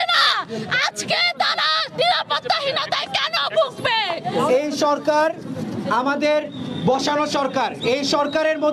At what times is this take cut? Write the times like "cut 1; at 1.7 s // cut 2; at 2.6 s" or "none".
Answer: cut 1; at 4.4 s